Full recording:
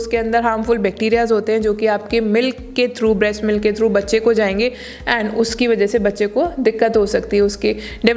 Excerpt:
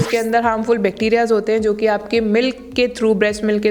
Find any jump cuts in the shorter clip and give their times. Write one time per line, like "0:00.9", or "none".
none

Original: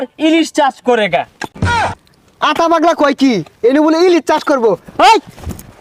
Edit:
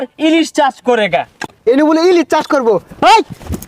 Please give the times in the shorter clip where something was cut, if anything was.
0:01.5

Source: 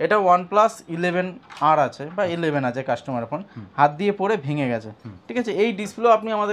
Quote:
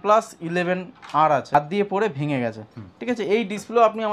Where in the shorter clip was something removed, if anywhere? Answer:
0:01.5

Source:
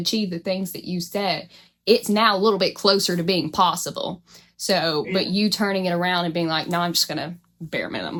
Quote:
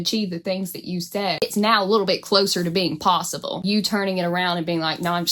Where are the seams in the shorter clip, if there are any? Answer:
0:01.4
0:03.6

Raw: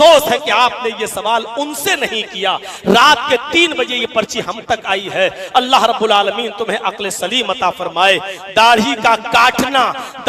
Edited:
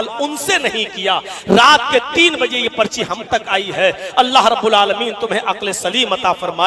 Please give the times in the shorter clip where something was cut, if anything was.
none

